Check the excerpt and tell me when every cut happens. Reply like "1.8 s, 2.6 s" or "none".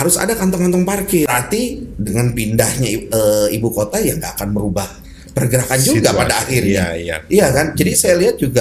1.3 s